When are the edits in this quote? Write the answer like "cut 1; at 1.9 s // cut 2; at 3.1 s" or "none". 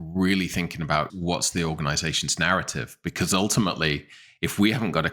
cut 1; at 1.1 s